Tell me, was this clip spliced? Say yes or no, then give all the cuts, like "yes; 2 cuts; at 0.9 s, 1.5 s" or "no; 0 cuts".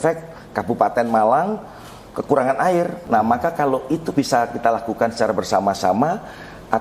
yes; 1 cut; at 3.0 s